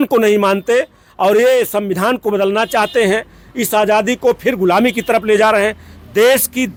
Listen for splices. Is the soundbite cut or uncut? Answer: uncut